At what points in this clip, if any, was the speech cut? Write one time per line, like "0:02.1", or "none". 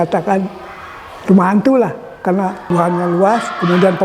0:02.6